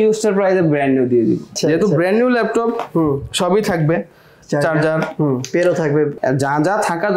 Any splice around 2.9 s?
no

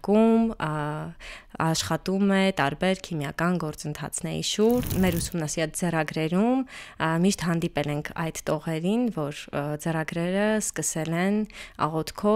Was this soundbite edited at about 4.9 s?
yes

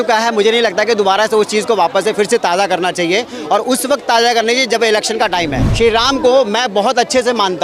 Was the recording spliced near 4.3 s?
no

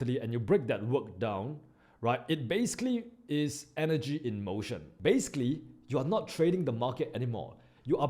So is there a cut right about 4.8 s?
yes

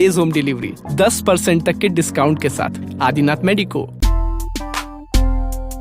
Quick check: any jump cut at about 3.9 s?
yes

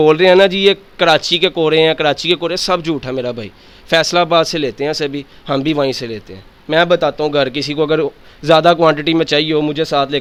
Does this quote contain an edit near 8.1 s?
no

